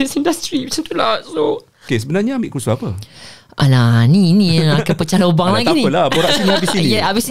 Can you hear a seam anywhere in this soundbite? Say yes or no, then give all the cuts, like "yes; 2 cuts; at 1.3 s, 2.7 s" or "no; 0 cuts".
yes; 1 cut; at 1.9 s